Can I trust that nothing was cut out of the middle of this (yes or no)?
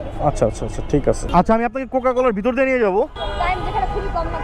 no